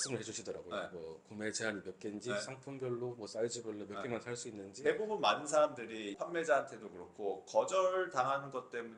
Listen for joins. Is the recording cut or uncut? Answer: cut